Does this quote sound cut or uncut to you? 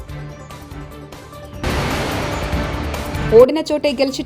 cut